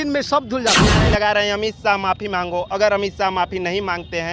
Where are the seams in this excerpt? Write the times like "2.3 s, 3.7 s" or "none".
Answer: 0.9 s